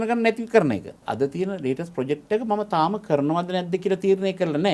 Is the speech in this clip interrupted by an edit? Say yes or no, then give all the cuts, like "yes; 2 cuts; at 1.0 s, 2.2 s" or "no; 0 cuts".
yes; 1 cut; at 1.0 s